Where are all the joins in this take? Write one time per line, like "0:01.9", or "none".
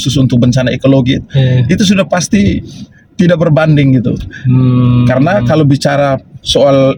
none